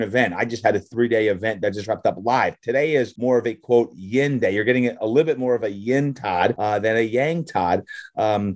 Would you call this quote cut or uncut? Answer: cut